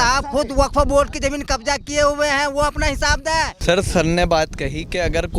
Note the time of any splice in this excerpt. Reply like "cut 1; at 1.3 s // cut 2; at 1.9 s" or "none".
cut 1; at 3.5 s